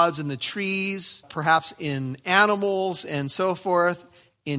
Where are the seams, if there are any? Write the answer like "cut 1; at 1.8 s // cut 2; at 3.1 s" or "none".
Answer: cut 1; at 1.3 s

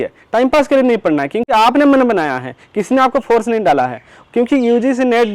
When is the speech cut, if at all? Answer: none

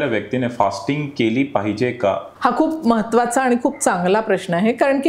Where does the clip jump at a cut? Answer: cut 1; at 2.3 s

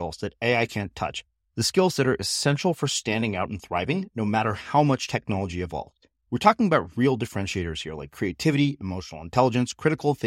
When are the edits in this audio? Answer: none

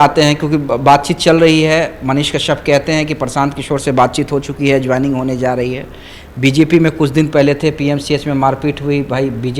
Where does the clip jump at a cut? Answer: none

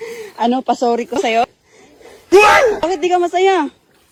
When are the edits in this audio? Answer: none

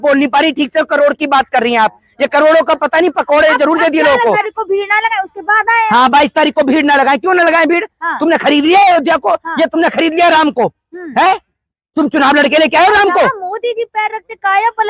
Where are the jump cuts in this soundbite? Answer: cut 1; at 4.4 s

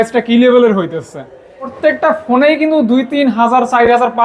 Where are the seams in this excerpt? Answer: cut 1; at 1.7 s

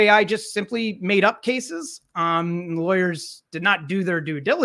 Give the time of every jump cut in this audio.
none

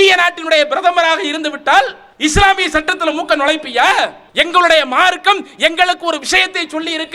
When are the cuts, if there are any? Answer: cut 1; at 2.0 s // cut 2; at 4.2 s

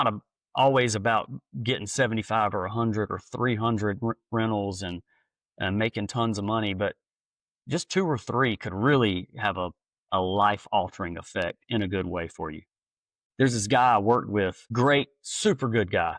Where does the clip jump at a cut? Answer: cut 1; at 13.2 s

